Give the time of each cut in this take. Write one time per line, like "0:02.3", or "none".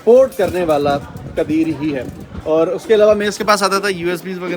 none